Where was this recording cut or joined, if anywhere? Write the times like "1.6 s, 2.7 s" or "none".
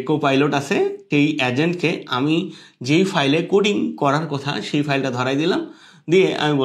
1.0 s